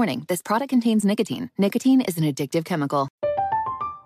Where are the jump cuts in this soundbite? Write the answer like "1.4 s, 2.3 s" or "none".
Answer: 3.1 s